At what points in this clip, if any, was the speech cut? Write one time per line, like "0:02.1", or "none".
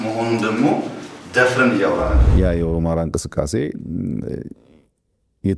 0:02.2